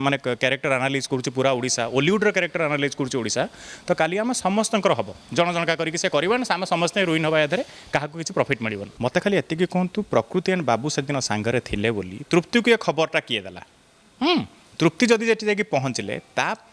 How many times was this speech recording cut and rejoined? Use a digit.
1